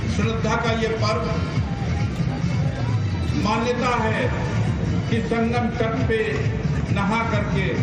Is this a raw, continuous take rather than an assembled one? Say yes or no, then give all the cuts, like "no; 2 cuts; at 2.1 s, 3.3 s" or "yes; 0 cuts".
no; 1 cut; at 1.5 s